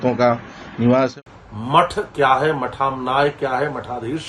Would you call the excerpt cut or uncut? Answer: cut